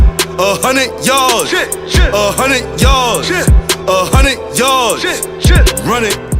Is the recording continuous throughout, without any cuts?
yes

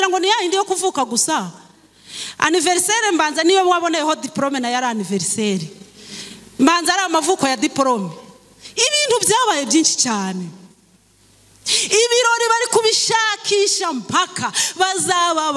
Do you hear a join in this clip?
no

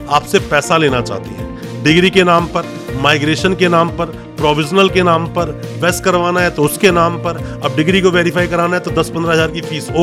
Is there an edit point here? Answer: no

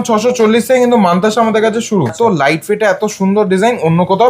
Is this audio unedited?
no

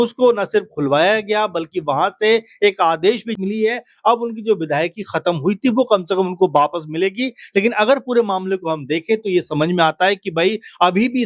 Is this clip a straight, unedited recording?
no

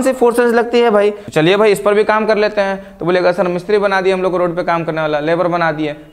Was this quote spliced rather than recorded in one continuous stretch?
yes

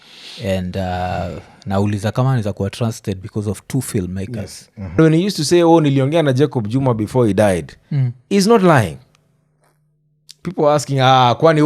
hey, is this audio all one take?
no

